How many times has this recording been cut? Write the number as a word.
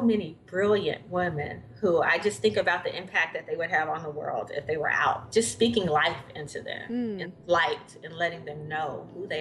one